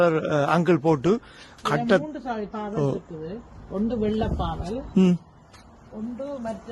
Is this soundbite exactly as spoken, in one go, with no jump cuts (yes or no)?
yes